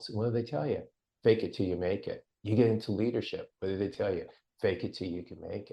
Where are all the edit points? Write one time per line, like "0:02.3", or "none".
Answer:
none